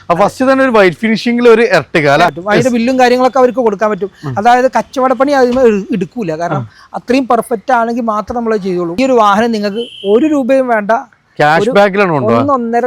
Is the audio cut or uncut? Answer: cut